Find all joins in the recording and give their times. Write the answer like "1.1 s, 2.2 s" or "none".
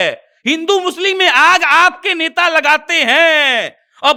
none

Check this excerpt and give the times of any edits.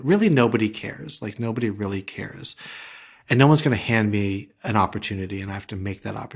none

